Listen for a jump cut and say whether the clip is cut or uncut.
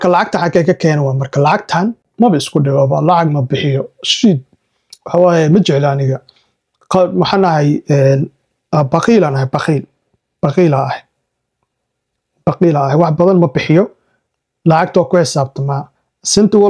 cut